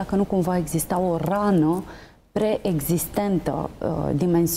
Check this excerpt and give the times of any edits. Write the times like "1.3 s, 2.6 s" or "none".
none